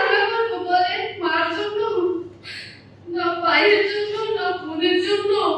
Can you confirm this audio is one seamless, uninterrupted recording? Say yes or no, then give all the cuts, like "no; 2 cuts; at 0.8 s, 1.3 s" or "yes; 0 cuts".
yes; 0 cuts